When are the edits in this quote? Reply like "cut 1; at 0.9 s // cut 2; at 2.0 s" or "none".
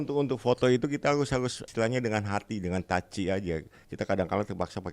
cut 1; at 1.6 s // cut 2; at 3.8 s